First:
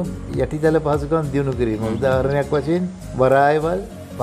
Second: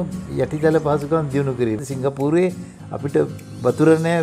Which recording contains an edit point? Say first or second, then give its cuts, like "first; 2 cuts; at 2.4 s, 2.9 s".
second; 1 cut; at 1.8 s